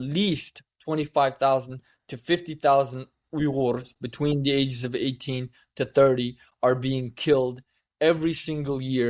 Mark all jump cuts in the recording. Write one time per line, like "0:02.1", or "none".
none